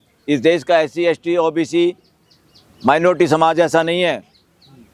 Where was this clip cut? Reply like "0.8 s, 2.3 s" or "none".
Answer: none